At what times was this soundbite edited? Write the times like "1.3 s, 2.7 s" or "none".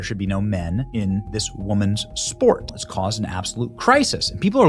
none